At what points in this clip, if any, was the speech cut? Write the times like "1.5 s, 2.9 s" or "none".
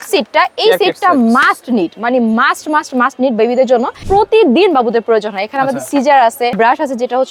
4.0 s, 6.6 s